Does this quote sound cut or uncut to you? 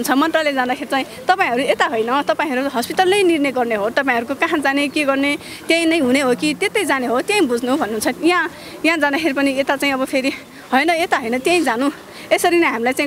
uncut